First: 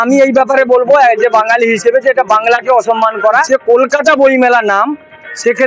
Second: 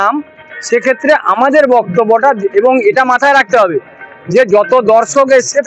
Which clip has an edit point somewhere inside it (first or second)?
first